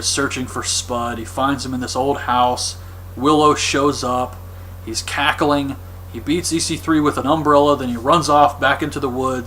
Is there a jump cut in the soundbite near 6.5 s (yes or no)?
yes